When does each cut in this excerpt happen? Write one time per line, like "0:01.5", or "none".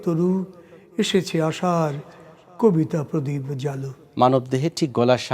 0:04.0